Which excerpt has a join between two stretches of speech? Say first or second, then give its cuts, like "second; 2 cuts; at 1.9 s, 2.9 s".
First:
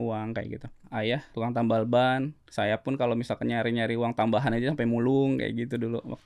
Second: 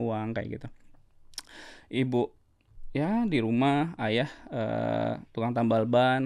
first; 2 cuts; at 1.3 s, 2.4 s